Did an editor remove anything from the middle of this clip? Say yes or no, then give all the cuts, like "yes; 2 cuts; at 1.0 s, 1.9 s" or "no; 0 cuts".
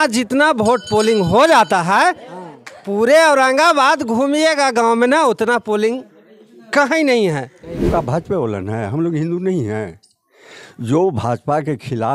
yes; 1 cut; at 7.9 s